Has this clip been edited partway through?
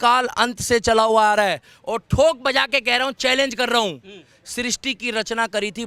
no; 0 cuts

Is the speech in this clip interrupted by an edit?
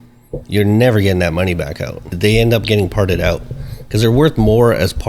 yes; 1 cut; at 2.0 s

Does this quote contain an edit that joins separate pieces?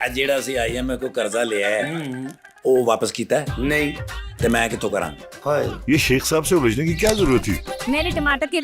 no; 0 cuts

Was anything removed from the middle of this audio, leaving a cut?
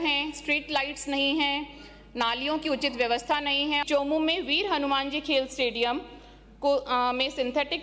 yes; 1 cut; at 3.8 s

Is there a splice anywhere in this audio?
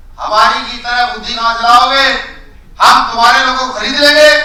no; 0 cuts

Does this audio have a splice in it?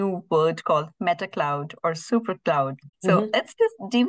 yes; 1 cut; at 2.8 s

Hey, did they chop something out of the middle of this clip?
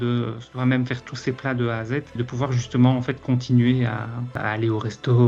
no; 0 cuts

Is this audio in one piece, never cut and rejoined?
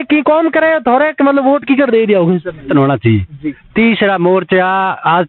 no; 1 cut; at 2.7 s

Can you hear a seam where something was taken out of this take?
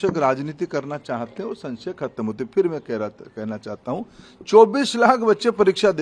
no; 0 cuts

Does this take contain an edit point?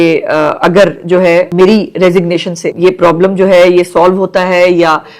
yes; 2 cuts; at 1.5 s, 2.6 s

